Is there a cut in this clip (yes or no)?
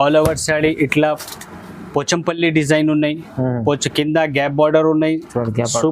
no